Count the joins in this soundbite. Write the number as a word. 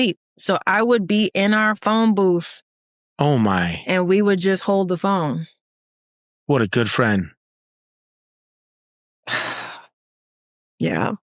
zero